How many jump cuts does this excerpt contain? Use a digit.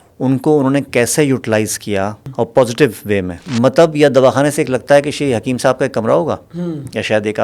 2